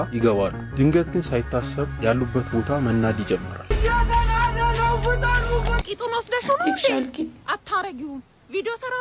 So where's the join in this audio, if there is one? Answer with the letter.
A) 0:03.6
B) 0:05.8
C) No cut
B